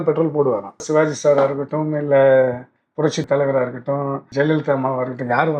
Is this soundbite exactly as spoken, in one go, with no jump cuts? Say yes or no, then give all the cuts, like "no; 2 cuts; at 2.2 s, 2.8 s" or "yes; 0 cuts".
no; 3 cuts; at 0.8 s, 3.2 s, 4.3 s